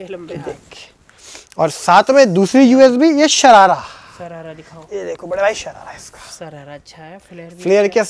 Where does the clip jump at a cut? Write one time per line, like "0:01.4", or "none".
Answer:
none